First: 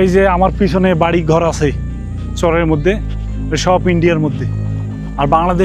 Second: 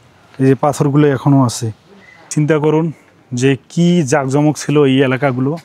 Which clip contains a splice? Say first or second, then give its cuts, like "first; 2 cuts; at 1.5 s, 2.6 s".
second; 1 cut; at 2.3 s